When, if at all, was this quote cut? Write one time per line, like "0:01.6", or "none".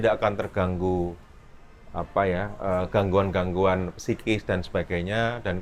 none